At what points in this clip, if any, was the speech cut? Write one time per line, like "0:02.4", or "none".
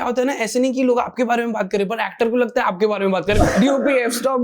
0:03.4

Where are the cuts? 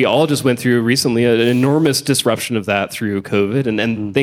none

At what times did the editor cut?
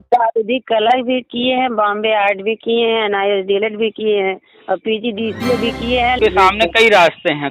0:06.2

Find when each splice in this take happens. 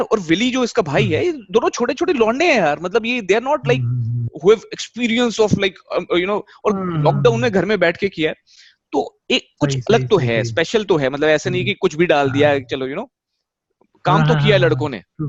none

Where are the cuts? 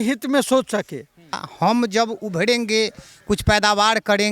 0:01.5

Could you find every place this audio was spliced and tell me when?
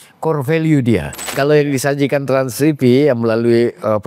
0:01.2

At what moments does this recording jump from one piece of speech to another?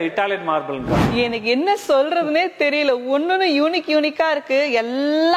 0:01.0

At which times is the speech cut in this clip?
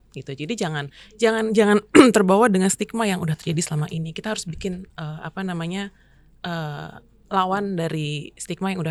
none

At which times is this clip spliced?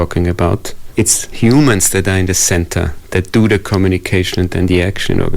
0:01.2

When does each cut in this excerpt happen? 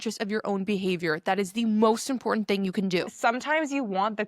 0:03.1

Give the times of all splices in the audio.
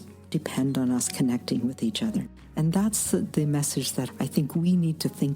0:02.4

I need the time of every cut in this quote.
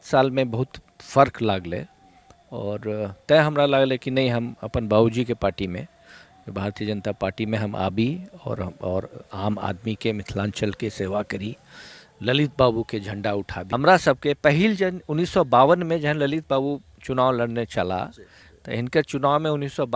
0:13.6

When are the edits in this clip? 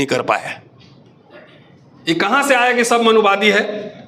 0:01.8

